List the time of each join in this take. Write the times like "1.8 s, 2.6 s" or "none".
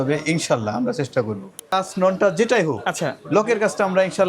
1.7 s

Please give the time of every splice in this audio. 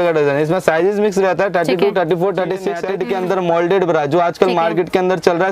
2.8 s

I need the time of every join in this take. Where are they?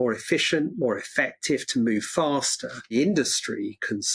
2.9 s

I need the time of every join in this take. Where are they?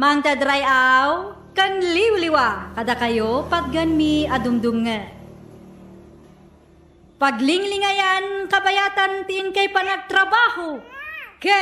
5.1 s, 7.1 s

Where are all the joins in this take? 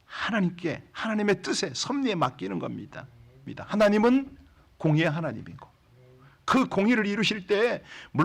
3.4 s

